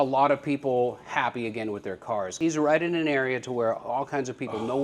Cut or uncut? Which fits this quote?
cut